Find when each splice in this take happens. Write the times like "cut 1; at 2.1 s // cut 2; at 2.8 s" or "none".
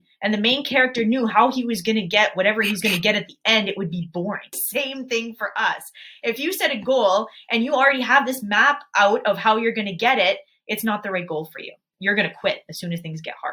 cut 1; at 4.6 s // cut 2; at 11.9 s